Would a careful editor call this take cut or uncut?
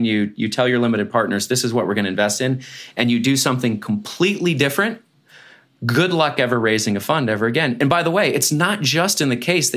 uncut